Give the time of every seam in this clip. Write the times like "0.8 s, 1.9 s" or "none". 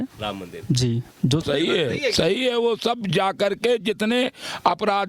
1.4 s